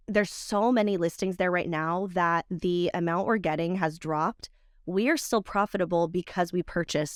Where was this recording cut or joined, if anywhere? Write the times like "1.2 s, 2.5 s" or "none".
none